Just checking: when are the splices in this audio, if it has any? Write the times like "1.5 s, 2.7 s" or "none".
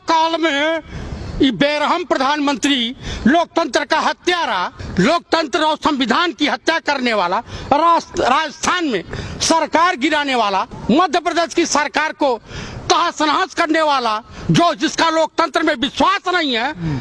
4.8 s, 10.7 s